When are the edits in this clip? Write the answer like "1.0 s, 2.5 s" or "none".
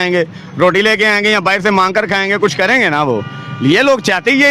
none